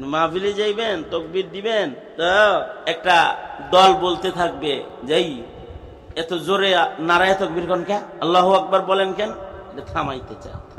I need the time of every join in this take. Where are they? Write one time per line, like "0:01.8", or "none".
0:02.0
0:02.7
0:04.9
0:08.1